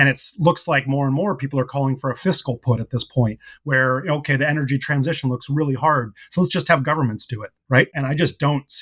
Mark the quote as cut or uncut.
uncut